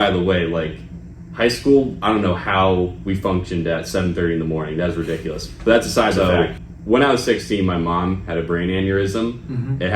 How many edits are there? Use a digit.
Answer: 1